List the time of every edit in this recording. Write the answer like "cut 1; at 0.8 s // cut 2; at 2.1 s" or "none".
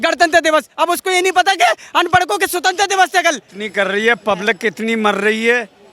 cut 1; at 3.5 s

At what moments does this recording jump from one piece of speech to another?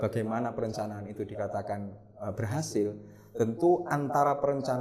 none

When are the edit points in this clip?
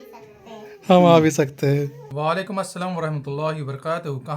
cut 1; at 2.0 s

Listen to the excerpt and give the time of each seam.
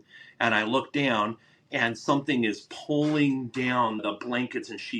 cut 1; at 4.0 s

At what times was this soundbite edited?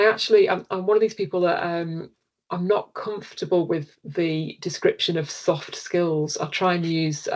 none

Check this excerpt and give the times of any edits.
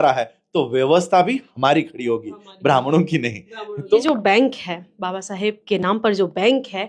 cut 1; at 4.0 s

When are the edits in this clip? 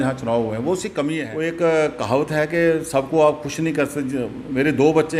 cut 1; at 1.2 s

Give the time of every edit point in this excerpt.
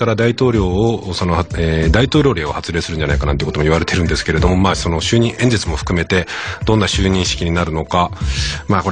none

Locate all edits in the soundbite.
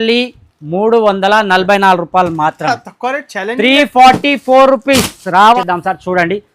cut 1; at 5.6 s

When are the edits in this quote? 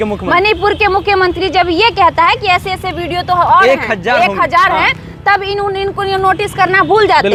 none

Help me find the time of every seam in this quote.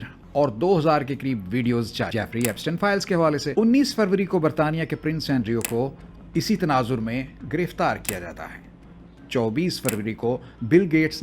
cut 1; at 2.1 s // cut 2; at 3.5 s

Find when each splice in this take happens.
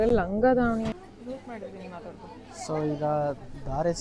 cut 1; at 0.9 s

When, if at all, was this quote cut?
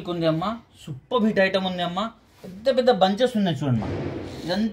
none

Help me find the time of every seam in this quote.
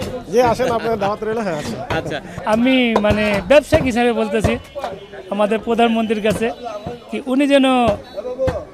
cut 1; at 2.3 s

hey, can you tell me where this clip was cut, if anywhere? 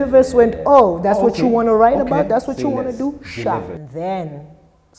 cut 1; at 3.8 s

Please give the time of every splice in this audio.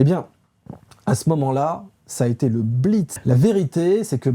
cut 1; at 3.1 s

